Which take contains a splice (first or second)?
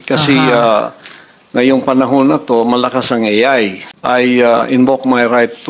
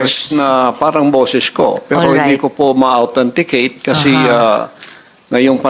first